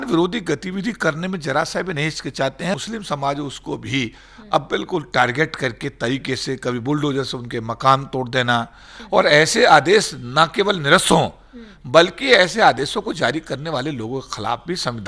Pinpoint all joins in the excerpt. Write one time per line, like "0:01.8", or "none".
0:02.8
0:08.9